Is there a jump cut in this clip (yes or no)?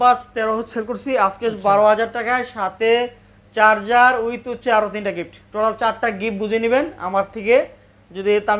no